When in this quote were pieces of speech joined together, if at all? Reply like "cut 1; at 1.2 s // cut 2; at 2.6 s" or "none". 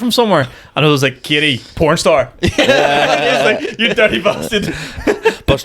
none